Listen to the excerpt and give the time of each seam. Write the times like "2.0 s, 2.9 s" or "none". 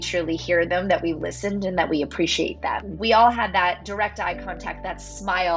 2.9 s, 3.8 s